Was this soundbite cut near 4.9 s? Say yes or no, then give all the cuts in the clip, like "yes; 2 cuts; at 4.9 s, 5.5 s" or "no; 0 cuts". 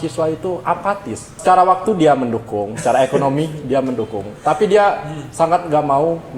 no; 1 cut; at 1.3 s